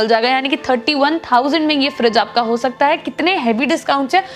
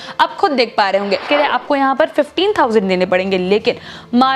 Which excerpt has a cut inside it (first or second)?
second